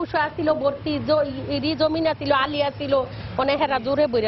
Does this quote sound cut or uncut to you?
uncut